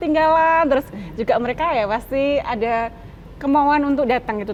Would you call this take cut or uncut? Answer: uncut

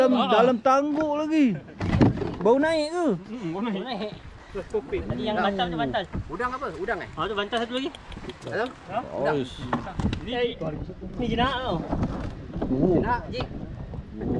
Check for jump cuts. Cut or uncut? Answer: uncut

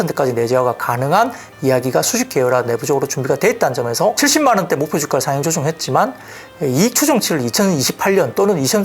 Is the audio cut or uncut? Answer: cut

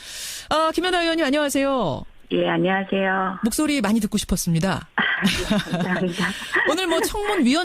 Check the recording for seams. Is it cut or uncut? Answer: cut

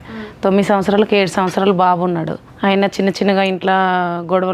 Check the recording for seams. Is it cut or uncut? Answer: cut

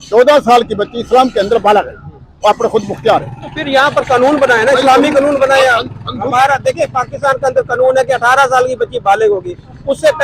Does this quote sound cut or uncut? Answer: uncut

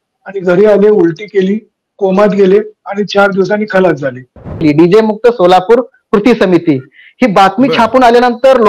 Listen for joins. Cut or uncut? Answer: cut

